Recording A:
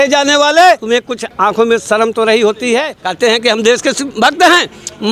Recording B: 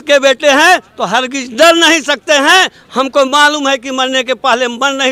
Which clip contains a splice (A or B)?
A